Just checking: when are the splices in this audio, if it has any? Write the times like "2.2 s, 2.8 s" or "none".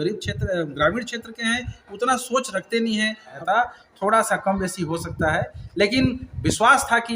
3.4 s